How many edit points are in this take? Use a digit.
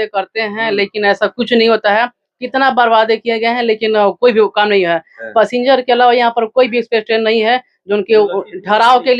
0